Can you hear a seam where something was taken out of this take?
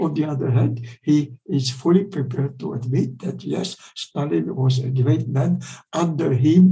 no; 0 cuts

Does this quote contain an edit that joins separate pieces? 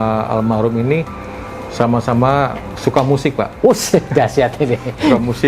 no; 0 cuts

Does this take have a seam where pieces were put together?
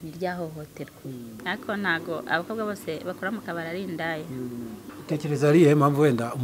yes; 2 cuts; at 1.4 s, 4.9 s

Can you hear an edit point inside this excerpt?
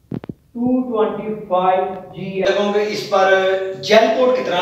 yes; 1 cut; at 2.4 s

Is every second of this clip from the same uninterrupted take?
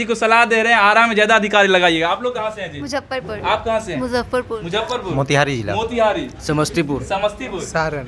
yes; 0 cuts

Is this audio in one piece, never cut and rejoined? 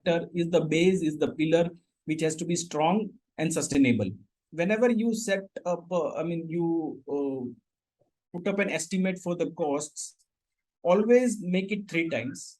no; 1 cut; at 4.4 s

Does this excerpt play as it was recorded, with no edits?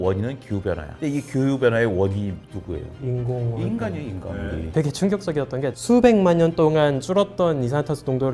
no; 2 cuts; at 4.7 s, 5.8 s

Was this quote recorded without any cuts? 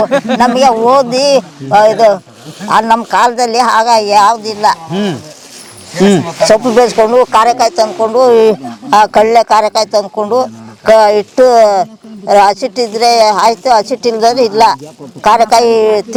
yes; 0 cuts

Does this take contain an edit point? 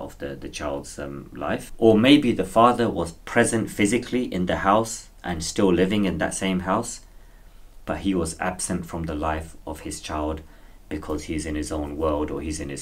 no; 0 cuts

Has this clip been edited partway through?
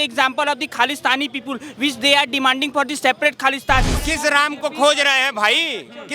yes; 1 cut; at 3.9 s

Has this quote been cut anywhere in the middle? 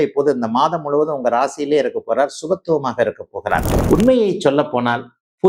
yes; 1 cut; at 3.7 s

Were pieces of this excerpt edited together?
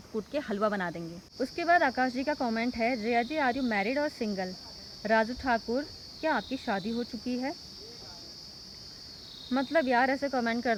no; 0 cuts

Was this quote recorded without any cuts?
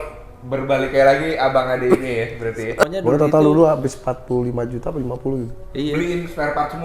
no; 1 cut; at 2.8 s

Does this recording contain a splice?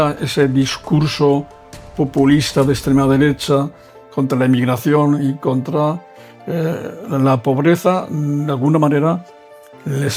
no; 0 cuts

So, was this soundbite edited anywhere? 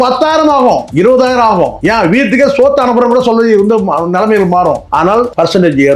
yes; 3 cuts; at 0.9 s, 1.8 s, 5.1 s

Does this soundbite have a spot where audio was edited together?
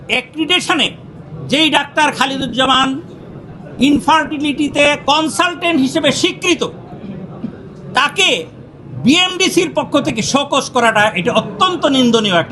no; 0 cuts

